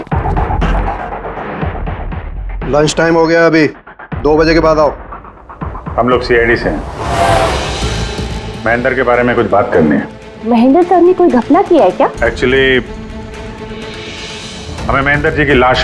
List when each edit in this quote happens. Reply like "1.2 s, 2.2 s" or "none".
10.2 s, 12.1 s